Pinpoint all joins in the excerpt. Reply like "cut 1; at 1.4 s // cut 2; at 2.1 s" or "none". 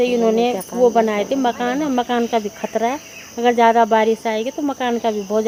none